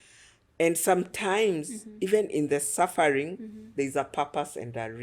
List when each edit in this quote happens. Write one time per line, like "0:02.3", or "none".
none

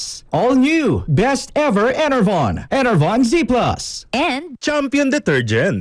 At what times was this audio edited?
0:04.3

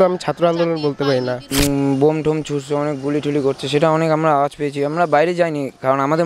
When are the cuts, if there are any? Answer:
0:01.6

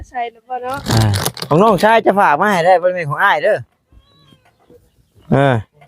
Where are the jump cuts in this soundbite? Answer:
0:01.1

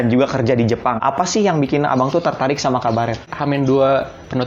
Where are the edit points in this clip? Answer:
0:01.0
0:03.3

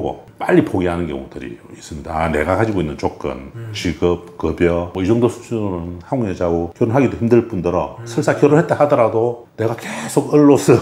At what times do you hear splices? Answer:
none

